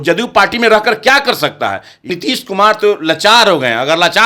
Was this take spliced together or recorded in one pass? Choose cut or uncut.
cut